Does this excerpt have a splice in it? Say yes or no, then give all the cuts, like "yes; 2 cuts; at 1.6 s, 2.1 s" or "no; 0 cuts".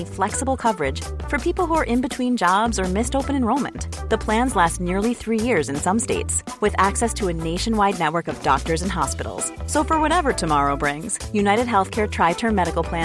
no; 0 cuts